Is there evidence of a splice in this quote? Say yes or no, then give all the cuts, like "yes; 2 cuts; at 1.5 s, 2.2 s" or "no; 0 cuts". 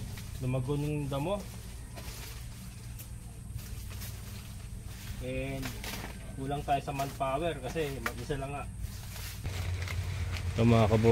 yes; 1 cut; at 9.5 s